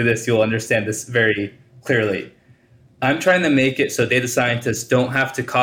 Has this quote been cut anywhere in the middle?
yes; 1 cut; at 1.7 s

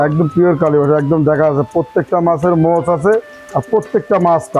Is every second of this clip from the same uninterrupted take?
yes; 0 cuts

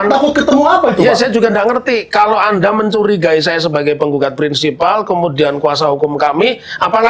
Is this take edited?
no; 0 cuts

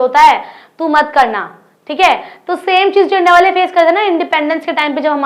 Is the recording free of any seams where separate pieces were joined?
yes; 0 cuts

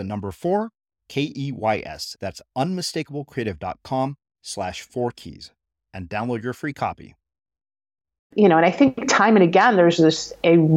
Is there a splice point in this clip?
yes; 1 cut; at 8.3 s

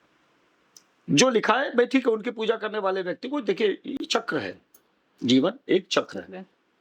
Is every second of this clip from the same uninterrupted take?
yes; 0 cuts

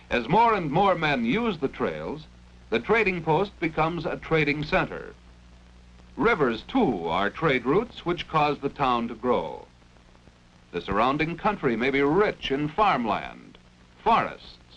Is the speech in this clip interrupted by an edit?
yes; 1 cut; at 2.0 s

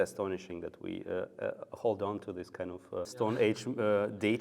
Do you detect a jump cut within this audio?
yes; 1 cut; at 3.1 s

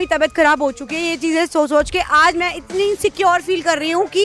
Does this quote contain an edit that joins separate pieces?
no; 0 cuts

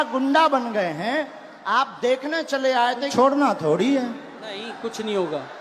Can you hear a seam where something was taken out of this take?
yes; 1 cut; at 3.1 s

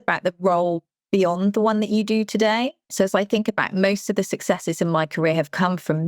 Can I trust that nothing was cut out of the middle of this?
no; 1 cut; at 2.8 s

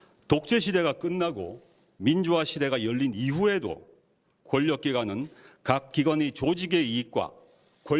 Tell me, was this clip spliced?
yes; 1 cut; at 3.1 s

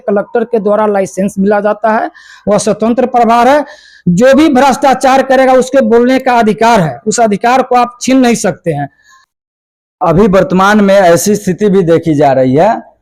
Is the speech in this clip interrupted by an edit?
no; 0 cuts

